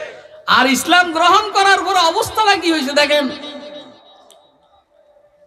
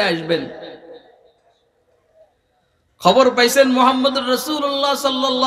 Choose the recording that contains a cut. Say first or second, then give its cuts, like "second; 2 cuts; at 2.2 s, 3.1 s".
first; 1 cut; at 4.2 s